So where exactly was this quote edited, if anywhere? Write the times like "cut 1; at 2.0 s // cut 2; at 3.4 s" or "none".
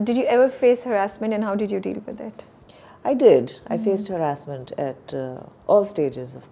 none